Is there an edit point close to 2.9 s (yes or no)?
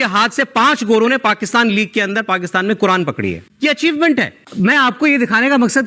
no